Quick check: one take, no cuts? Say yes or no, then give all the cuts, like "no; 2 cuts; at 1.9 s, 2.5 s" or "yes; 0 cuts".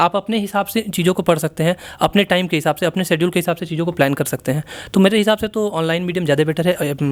yes; 0 cuts